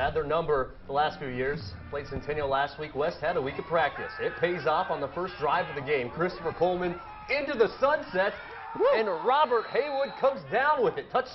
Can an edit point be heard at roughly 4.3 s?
yes; 1 cut; at 4.3 s

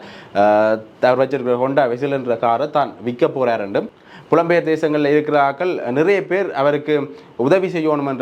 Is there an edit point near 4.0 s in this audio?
yes; 1 cut; at 4.0 s

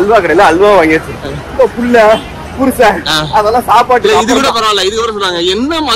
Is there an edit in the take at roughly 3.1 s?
no; 0 cuts

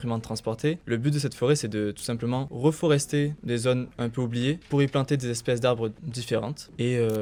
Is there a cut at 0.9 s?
no; 0 cuts

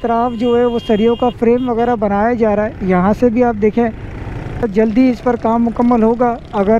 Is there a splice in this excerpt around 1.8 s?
no; 1 cut; at 4.6 s

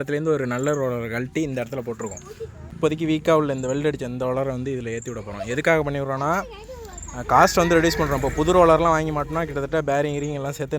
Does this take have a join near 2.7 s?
yes; 1 cut; at 2.7 s

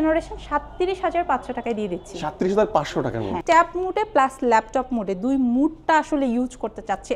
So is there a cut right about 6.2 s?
no; 1 cut; at 3.4 s

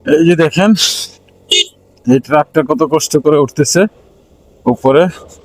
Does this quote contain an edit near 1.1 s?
no; 0 cuts

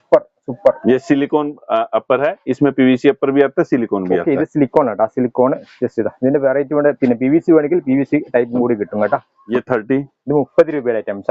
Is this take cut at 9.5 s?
yes; 1 cut; at 9.5 s

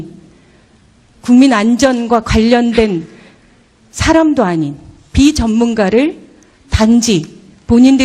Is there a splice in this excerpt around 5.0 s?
no; 1 cut; at 6.6 s

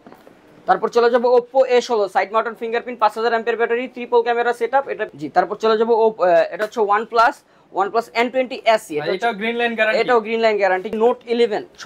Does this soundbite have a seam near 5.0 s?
yes; 2 cuts; at 5.0 s, 10.9 s

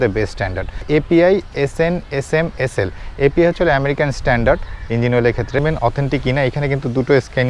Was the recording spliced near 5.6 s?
yes; 2 cuts; at 0.8 s, 5.6 s

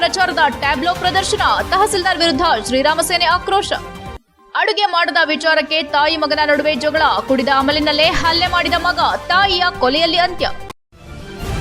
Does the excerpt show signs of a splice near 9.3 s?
no; 1 cut; at 10.6 s

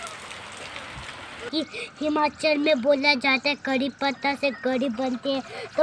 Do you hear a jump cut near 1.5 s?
yes; 1 cut; at 1.5 s

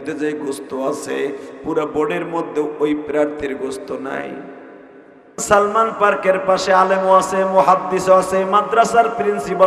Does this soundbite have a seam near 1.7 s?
no; 1 cut; at 5.4 s

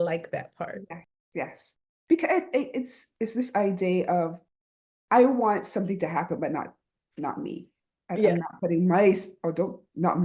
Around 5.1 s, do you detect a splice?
no; 1 cut; at 3.0 s

